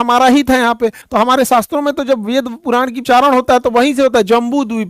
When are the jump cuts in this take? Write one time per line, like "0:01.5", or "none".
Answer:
0:01.0
0:03.0